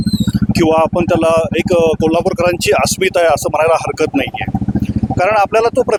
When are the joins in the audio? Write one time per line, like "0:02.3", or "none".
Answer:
none